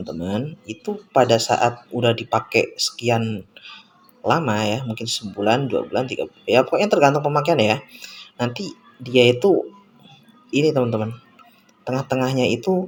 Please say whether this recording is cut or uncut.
uncut